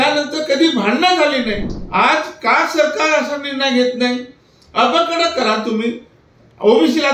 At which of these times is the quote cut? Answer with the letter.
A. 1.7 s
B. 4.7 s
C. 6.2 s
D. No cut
A